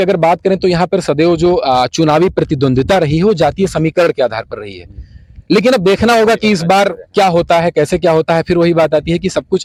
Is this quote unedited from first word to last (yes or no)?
yes